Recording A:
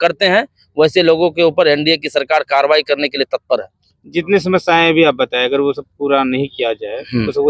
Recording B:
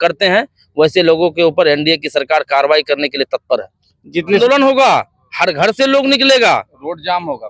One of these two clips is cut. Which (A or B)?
B